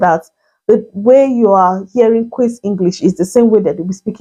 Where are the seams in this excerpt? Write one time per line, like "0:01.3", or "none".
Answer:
none